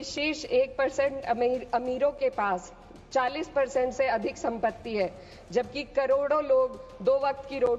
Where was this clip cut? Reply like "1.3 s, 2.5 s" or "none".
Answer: none